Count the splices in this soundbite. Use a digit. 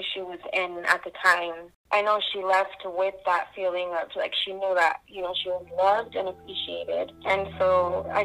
1